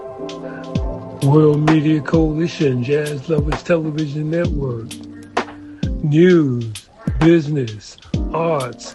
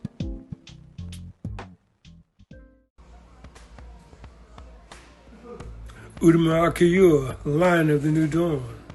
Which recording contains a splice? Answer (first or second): second